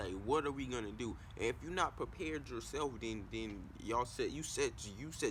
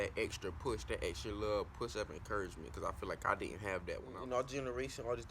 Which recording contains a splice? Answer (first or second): second